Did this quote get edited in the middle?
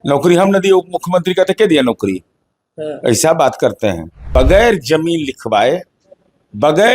yes; 1 cut; at 4.1 s

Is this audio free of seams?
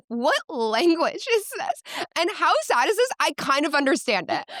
yes; 0 cuts

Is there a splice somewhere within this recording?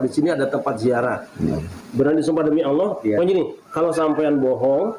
yes; 1 cut; at 1.7 s

